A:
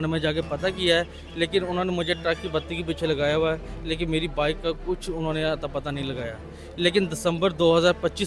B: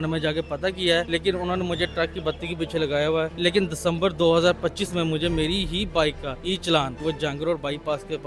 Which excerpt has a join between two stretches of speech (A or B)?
B